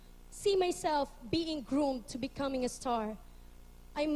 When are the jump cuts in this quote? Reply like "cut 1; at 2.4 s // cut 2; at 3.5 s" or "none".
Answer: cut 1; at 2.3 s